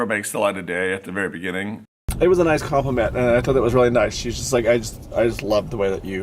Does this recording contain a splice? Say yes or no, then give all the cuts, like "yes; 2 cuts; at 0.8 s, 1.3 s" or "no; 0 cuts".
yes; 1 cut; at 2.0 s